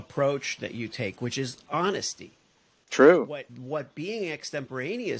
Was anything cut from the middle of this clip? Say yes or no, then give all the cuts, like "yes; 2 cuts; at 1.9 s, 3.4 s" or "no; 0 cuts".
yes; 1 cut; at 3.5 s